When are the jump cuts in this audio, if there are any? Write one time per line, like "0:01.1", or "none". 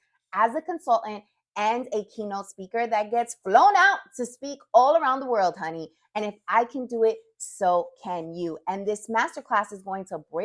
none